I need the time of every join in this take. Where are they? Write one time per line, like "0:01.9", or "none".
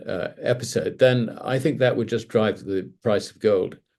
none